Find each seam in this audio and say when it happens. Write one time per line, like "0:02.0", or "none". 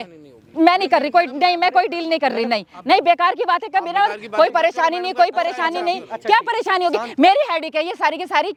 none